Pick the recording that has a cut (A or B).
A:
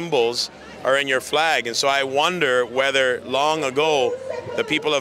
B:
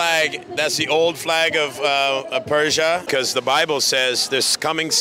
B